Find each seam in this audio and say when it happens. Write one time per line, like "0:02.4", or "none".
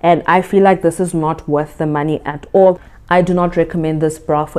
0:02.9